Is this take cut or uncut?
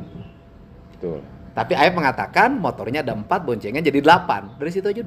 uncut